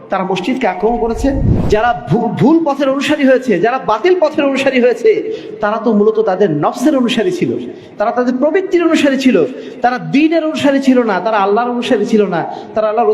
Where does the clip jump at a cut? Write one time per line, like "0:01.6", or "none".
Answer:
0:01.5